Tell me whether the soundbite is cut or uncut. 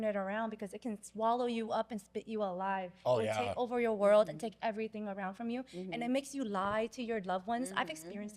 uncut